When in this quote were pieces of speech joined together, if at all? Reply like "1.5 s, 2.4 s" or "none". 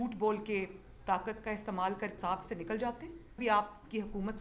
3.4 s